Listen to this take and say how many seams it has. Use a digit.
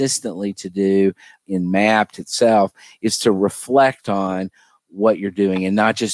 1